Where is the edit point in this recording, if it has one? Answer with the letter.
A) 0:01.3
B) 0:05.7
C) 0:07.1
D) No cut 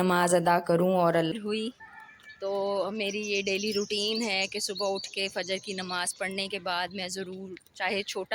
A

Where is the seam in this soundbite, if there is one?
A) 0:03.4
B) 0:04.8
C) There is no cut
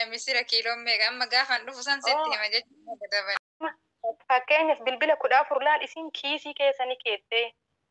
A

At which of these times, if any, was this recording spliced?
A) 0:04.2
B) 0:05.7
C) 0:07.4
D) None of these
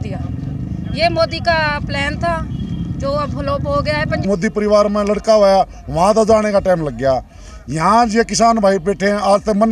A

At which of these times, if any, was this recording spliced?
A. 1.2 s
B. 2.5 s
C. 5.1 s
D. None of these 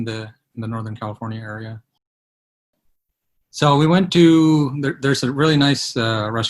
B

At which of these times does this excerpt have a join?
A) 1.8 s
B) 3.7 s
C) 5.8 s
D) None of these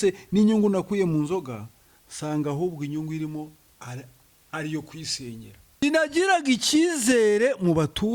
C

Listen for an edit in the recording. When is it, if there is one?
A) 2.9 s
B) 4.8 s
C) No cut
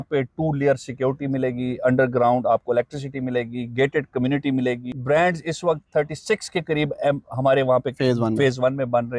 B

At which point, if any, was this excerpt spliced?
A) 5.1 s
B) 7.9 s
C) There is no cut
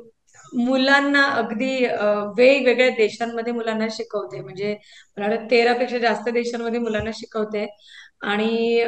C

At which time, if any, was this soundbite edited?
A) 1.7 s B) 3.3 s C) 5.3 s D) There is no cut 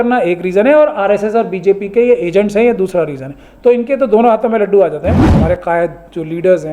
C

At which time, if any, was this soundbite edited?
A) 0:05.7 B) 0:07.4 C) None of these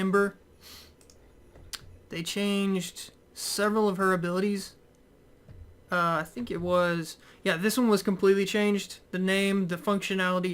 B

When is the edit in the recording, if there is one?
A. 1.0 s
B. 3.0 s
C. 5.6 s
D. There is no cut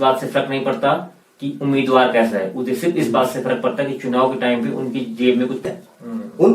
C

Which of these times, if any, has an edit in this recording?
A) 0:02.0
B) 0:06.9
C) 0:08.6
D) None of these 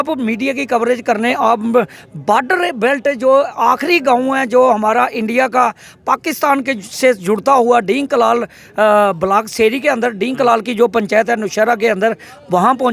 D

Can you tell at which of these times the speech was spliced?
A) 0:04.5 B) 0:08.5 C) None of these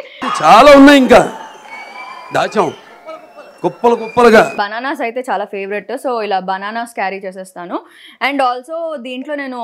A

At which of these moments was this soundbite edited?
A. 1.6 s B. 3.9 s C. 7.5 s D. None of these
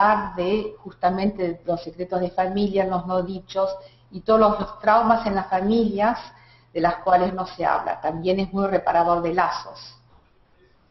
B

